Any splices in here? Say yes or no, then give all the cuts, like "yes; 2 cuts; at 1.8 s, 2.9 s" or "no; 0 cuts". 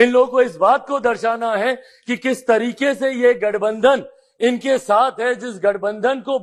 no; 0 cuts